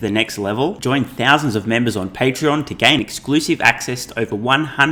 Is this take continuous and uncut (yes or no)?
yes